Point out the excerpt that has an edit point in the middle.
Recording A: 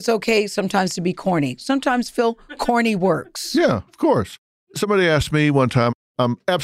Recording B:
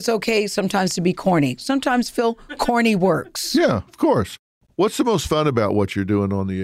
B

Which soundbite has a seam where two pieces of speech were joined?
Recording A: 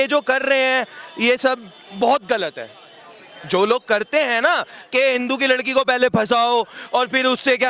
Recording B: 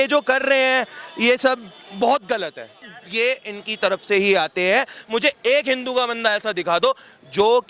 B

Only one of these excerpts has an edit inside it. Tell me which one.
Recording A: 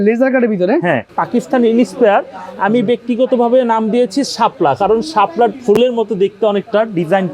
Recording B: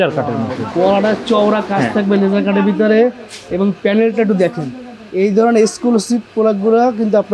A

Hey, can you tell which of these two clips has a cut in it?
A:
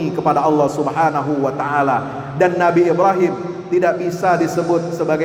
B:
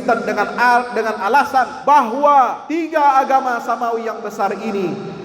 B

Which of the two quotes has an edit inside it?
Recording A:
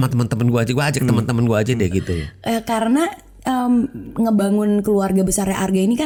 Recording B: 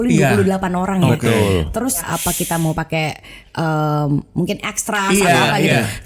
B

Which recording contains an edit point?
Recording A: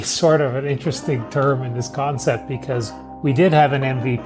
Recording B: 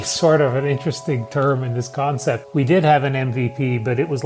B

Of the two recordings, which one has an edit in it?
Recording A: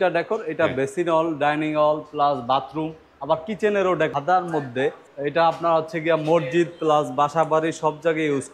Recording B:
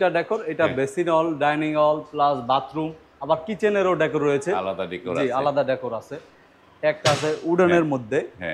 A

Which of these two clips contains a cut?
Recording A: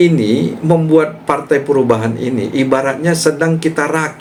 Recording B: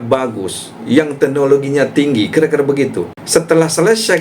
B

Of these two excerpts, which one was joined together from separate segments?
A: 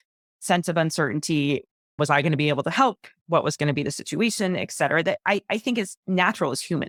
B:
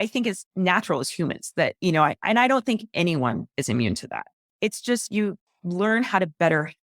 B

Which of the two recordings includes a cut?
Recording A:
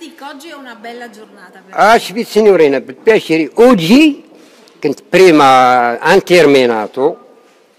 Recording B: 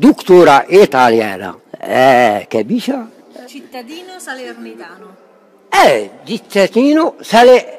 A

